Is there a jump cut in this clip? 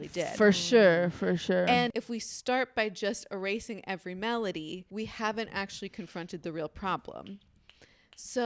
yes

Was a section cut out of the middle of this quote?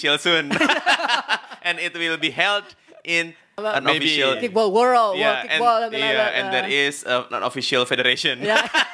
yes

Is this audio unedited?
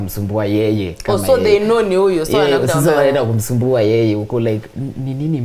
yes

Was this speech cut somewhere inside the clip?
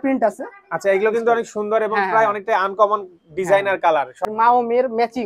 yes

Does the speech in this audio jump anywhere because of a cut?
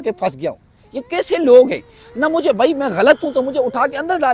no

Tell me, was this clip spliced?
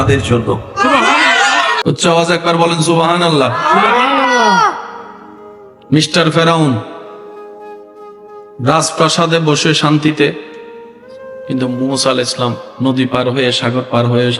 yes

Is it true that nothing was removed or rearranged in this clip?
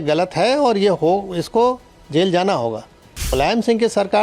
no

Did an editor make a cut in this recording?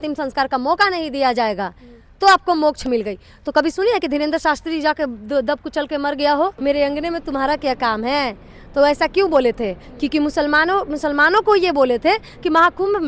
yes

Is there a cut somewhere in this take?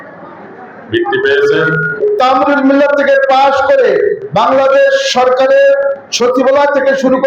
yes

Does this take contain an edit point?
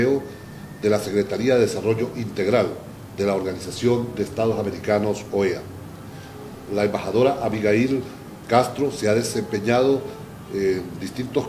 no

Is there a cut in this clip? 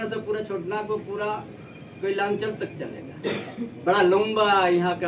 yes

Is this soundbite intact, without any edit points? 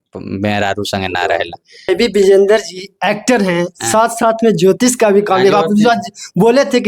no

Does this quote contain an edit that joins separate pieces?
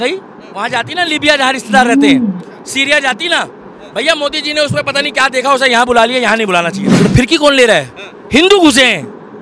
yes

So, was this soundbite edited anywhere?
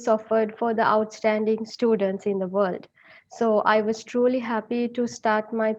no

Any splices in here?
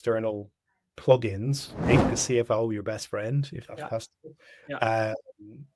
yes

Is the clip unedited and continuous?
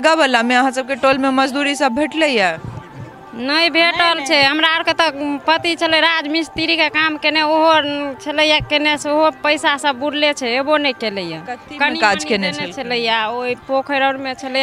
yes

